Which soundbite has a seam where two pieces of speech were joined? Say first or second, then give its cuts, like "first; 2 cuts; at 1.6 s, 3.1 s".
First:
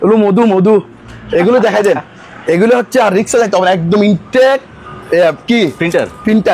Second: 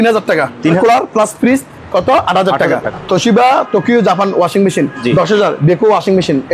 second; 2 cuts; at 0.8 s, 2.9 s